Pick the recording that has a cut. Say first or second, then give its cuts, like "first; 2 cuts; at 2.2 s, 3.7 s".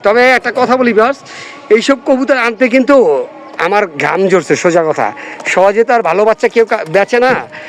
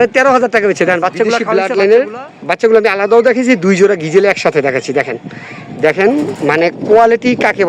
second; 1 cut; at 1.5 s